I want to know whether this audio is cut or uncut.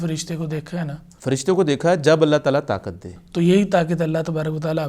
cut